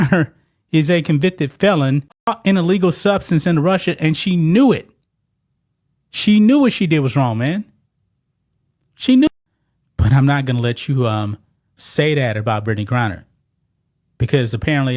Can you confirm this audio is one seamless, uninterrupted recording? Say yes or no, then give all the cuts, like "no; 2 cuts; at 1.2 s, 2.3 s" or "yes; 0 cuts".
no; 2 cuts; at 2.3 s, 9.3 s